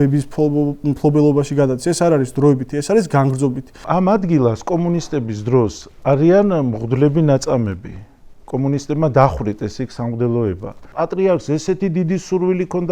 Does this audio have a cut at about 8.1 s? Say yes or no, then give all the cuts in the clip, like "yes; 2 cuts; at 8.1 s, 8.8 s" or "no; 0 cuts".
no; 2 cuts; at 3.9 s, 11.0 s